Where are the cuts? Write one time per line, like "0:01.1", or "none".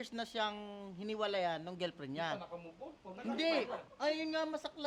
none

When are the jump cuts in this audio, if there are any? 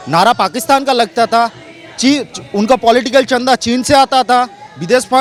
none

